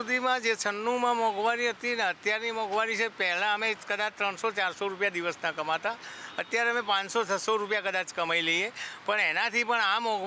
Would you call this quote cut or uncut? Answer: uncut